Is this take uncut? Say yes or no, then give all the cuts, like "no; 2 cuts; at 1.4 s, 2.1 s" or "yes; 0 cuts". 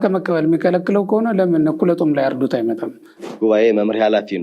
no; 1 cut; at 3.2 s